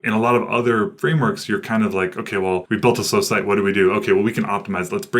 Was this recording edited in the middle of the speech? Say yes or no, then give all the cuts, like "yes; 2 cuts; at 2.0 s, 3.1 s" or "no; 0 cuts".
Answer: yes; 2 cuts; at 0.9 s, 2.6 s